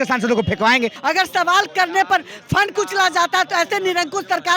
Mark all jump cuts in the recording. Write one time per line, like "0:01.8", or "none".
0:01.0